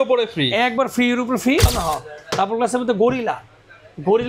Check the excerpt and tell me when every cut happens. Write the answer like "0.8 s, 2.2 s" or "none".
1.7 s